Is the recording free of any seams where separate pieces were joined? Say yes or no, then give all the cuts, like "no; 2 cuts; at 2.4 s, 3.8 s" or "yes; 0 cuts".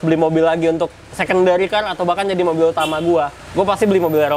no; 1 cut; at 3.4 s